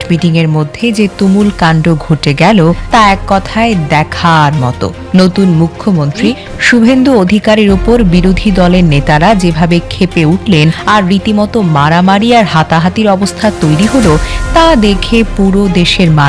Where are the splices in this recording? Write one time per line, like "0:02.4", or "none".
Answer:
0:02.8
0:10.8